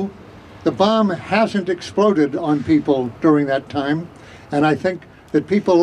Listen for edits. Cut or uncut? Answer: uncut